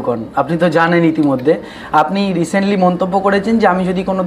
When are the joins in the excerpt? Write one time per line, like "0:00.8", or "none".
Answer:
none